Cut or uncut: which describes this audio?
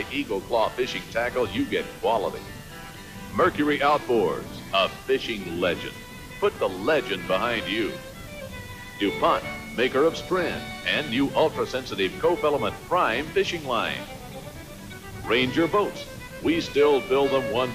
uncut